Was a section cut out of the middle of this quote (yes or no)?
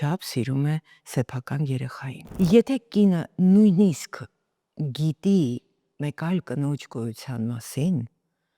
yes